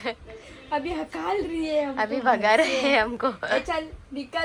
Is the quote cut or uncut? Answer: uncut